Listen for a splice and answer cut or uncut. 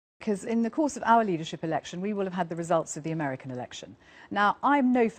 uncut